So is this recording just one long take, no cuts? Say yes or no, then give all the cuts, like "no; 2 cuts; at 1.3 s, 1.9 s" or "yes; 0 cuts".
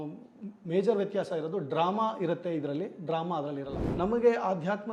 no; 1 cut; at 3.8 s